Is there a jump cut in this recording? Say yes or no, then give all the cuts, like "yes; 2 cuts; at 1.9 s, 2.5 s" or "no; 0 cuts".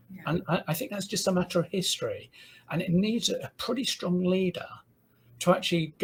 no; 0 cuts